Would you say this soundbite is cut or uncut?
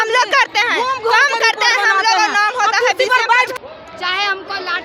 uncut